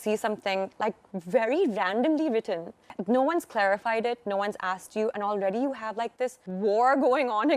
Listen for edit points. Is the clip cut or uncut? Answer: cut